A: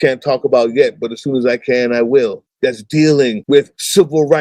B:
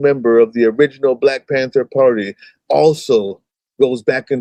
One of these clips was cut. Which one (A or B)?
A